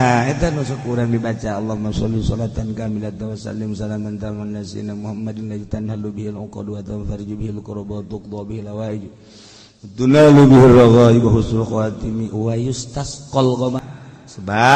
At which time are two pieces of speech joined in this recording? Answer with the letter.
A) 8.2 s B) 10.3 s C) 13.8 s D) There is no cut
C